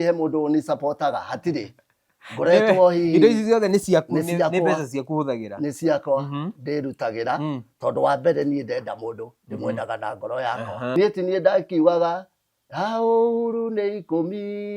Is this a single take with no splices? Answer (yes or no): no